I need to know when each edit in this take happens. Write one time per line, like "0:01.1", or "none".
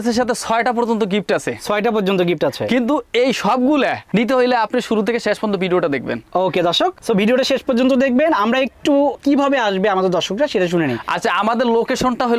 none